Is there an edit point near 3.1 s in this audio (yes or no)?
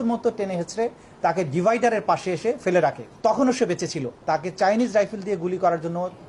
yes